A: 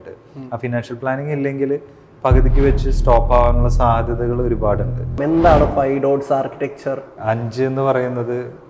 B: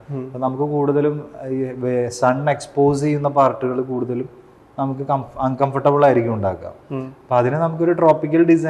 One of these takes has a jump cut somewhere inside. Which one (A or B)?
A